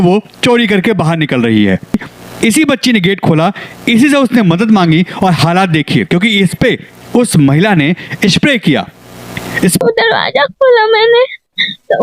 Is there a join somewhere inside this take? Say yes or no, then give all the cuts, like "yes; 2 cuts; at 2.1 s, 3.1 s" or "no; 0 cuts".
yes; 2 cuts; at 2.1 s, 9.8 s